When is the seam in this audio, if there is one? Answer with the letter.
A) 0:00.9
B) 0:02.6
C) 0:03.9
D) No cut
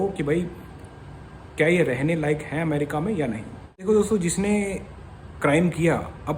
C